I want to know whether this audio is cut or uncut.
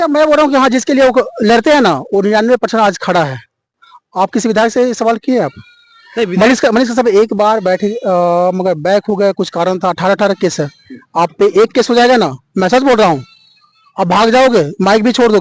cut